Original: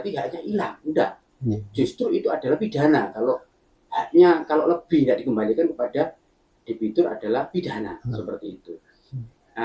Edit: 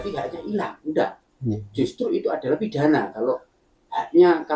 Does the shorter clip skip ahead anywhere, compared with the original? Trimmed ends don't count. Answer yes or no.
no